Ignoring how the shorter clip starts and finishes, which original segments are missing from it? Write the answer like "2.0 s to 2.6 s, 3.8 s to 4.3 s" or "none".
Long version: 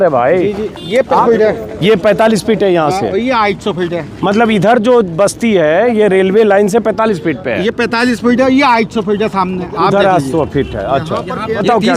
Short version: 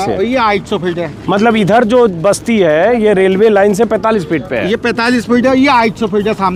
none